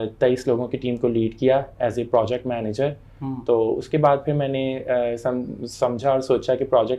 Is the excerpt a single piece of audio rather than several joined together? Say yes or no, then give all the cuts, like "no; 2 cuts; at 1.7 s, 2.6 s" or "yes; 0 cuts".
yes; 0 cuts